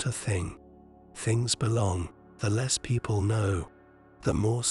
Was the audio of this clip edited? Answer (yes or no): yes